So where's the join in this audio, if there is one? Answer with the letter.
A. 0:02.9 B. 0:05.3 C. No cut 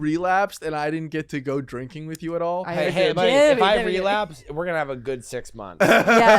A